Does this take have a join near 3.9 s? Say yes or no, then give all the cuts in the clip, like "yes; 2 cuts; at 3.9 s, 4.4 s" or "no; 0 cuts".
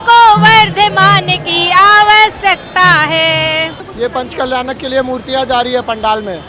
yes; 1 cut; at 3.9 s